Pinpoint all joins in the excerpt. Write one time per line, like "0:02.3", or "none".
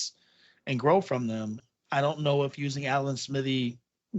0:01.6

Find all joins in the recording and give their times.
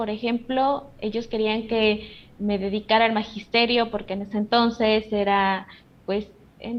none

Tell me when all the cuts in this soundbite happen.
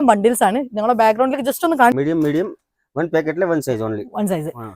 0:01.9

